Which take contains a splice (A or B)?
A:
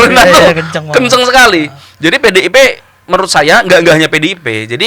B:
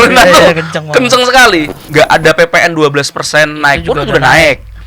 B